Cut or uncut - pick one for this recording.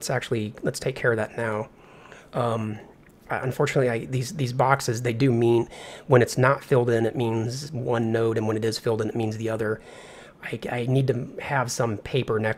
uncut